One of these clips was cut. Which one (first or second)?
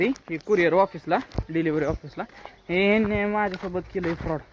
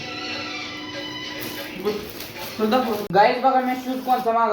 second